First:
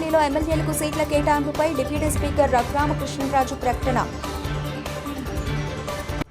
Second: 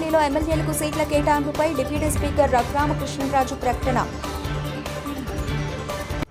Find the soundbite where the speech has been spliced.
first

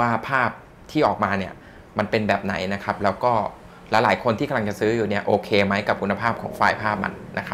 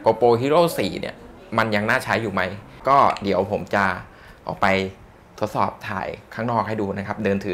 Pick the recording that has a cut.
second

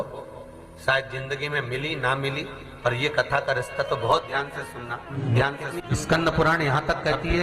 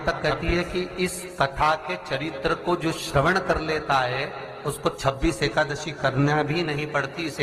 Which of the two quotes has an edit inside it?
first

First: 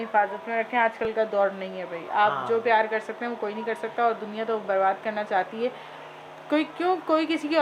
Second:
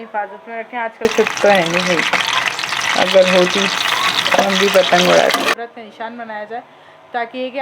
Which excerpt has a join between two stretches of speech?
second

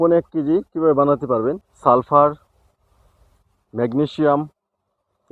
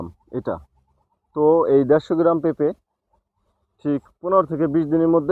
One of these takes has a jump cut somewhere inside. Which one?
first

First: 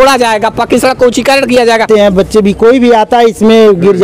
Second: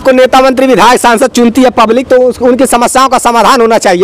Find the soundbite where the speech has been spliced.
first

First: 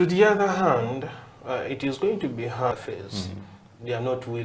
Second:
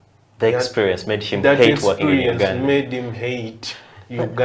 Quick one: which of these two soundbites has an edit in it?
first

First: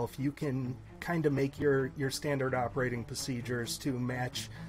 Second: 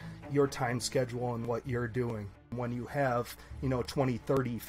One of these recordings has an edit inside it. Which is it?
second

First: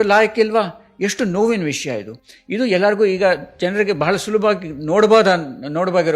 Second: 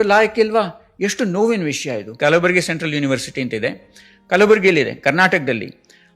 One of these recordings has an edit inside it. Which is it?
second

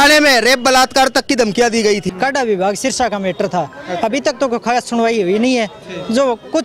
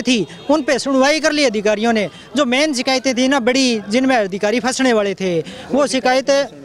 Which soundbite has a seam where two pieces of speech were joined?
first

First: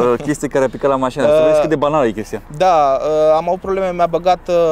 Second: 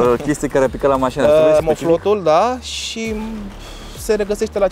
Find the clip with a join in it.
second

